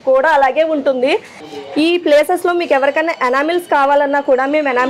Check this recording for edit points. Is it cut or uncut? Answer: cut